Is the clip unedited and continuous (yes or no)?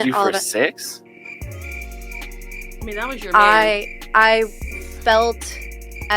yes